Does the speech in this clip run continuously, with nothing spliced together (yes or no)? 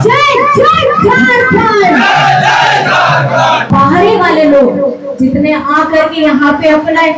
no